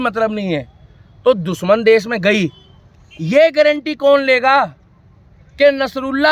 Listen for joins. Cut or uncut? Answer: uncut